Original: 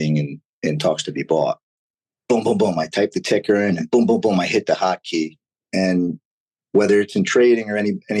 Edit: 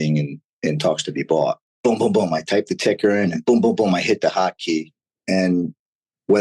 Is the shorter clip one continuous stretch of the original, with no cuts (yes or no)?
no